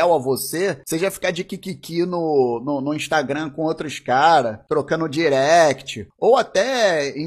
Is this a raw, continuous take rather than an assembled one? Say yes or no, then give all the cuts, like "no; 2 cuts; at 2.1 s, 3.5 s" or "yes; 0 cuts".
no; 1 cut; at 4.6 s